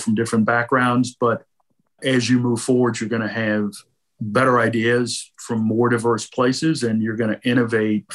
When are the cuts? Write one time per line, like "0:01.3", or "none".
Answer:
none